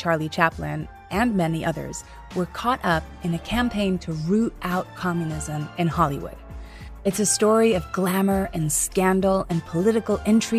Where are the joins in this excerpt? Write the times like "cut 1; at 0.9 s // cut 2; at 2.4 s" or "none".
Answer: none